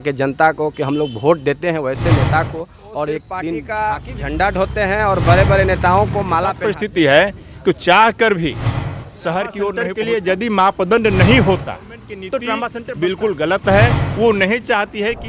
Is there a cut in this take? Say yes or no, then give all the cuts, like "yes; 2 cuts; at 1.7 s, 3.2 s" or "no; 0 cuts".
yes; 4 cuts; at 3.6 s, 6.7 s, 9.8 s, 12.7 s